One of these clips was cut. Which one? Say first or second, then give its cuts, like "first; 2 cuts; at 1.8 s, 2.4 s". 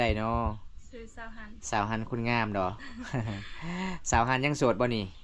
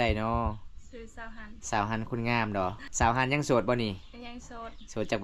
second; 1 cut; at 2.9 s